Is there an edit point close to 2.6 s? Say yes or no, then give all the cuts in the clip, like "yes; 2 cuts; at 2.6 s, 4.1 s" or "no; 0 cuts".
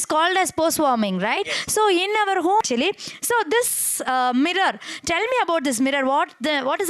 yes; 1 cut; at 2.6 s